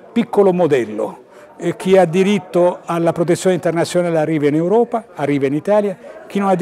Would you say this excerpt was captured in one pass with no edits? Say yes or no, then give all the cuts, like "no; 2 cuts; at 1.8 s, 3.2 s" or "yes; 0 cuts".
yes; 0 cuts